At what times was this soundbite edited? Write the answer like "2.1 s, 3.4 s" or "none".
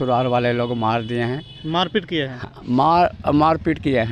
none